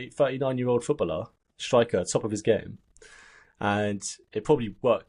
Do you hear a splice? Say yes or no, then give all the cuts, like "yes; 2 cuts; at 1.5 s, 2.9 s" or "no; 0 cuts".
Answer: no; 0 cuts